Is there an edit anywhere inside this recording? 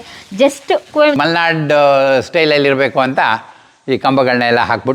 yes; 1 cut; at 1.1 s

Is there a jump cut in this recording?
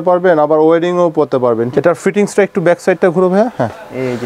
yes; 1 cut; at 1.7 s

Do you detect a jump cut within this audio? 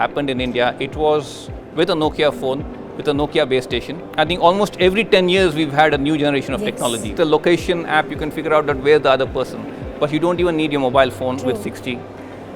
yes; 2 cuts; at 4.0 s, 7.1 s

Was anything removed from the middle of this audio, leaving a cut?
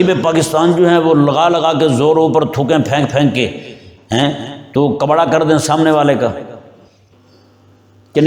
no; 0 cuts

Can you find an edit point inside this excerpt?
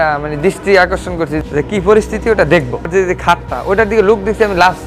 yes; 2 cuts; at 1.4 s, 2.9 s

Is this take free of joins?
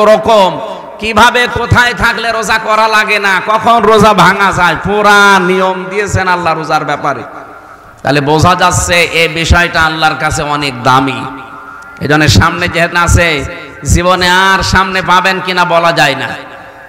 no; 1 cut; at 12.9 s

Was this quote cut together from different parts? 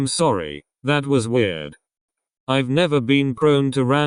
no; 0 cuts

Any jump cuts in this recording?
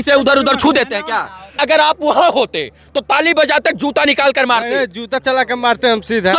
yes; 1 cut; at 1.6 s

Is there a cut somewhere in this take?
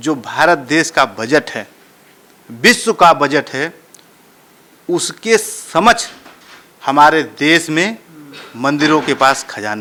no; 0 cuts

